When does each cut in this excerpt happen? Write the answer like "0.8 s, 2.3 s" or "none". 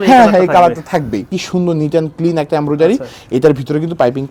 none